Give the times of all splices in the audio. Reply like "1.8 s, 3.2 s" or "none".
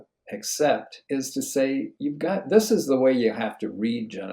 0.9 s, 1.9 s